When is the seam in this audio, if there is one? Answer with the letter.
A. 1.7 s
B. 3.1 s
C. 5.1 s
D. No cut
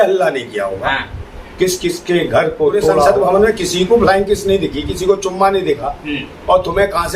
B